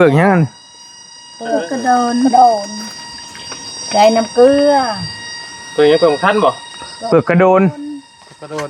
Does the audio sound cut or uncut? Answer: uncut